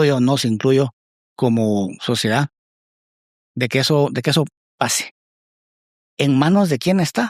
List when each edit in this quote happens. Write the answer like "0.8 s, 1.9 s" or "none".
none